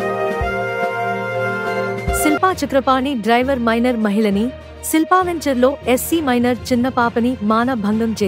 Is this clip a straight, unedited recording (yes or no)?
no